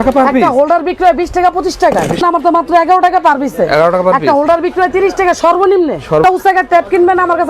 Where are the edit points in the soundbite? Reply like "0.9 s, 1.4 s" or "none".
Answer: 2.2 s, 6.2 s